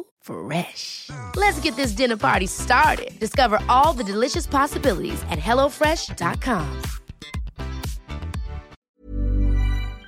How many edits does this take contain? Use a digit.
1